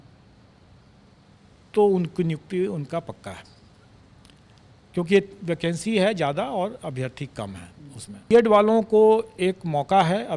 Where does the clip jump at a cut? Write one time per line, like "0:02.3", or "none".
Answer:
0:08.3